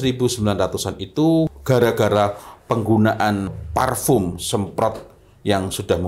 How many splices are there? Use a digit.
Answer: 2